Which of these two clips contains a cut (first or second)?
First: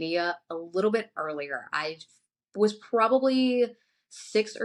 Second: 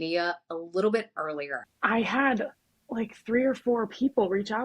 second